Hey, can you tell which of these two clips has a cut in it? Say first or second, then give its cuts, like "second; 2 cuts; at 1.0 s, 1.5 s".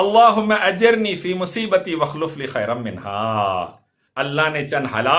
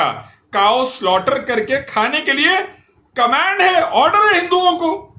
first; 1 cut; at 4.0 s